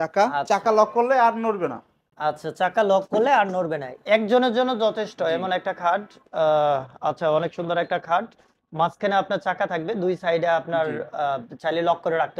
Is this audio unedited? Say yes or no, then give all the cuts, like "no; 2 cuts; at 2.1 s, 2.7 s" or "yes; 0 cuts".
yes; 0 cuts